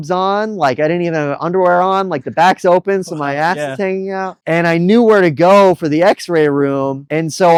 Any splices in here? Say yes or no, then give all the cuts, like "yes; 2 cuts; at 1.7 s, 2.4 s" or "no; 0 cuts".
no; 0 cuts